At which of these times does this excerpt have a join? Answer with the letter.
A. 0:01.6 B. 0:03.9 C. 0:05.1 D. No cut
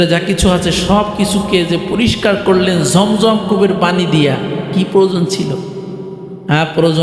D